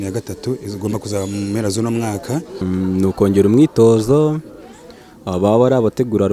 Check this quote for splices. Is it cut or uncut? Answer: cut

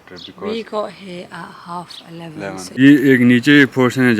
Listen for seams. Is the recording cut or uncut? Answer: cut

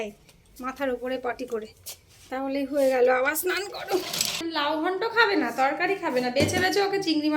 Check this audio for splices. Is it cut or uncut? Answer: cut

